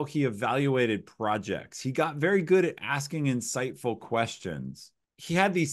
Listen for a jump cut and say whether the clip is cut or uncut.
uncut